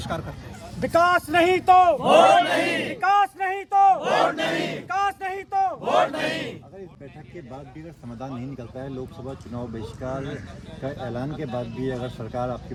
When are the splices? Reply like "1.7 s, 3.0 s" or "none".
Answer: none